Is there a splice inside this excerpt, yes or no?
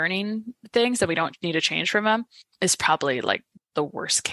no